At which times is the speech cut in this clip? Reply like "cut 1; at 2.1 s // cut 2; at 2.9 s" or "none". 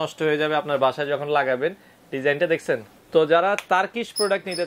cut 1; at 2.9 s